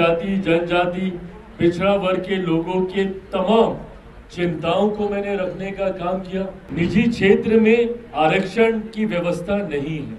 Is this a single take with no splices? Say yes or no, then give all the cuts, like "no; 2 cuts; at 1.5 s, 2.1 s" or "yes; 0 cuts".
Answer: no; 1 cut; at 6.6 s